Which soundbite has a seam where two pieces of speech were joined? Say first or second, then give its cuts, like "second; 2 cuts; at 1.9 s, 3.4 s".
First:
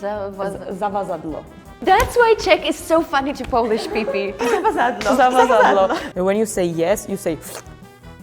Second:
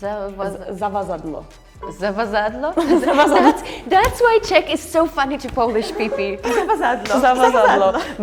first; 2 cuts; at 1.7 s, 6.0 s